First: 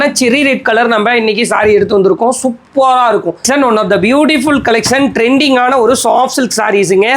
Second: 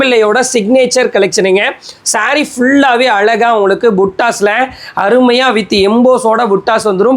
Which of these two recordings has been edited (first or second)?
first